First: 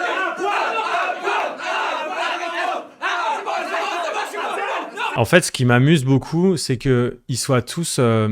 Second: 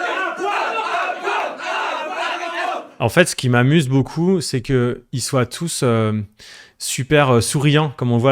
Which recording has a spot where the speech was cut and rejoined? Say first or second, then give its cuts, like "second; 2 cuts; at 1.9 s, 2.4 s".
second; 1 cut; at 3.0 s